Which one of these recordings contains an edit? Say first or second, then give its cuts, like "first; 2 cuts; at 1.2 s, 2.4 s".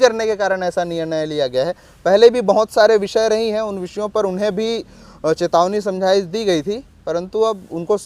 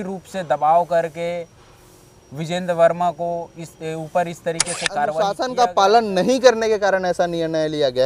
second; 1 cut; at 5.4 s